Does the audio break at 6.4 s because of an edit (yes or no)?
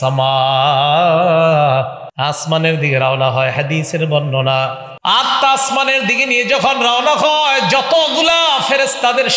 no